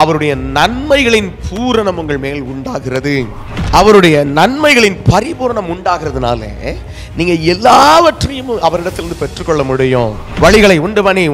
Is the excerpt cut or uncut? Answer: cut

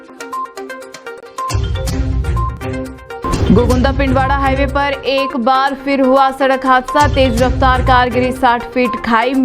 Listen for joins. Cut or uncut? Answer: cut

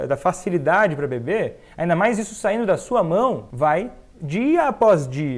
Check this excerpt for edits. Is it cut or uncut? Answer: cut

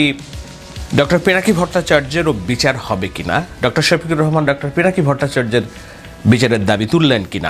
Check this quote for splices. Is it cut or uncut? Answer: uncut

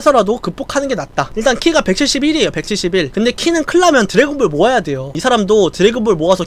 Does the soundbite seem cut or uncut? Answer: cut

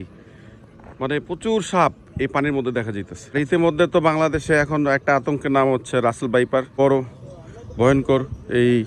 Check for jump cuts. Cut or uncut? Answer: cut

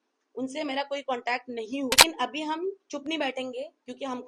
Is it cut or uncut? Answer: cut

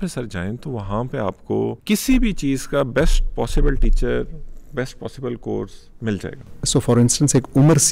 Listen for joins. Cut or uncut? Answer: cut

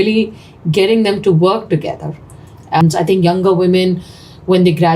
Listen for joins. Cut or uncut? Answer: cut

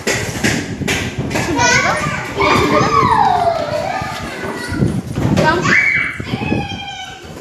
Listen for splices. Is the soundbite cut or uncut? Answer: uncut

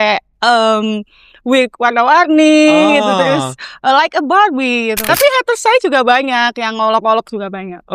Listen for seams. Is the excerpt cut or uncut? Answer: cut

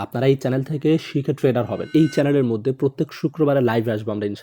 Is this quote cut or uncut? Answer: cut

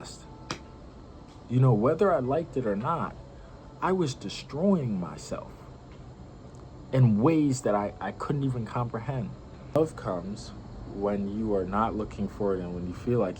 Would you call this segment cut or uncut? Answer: cut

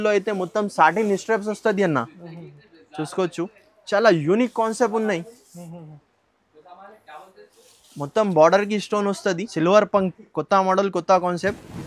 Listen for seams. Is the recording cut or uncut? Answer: cut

